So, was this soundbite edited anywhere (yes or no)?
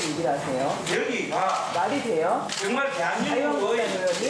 no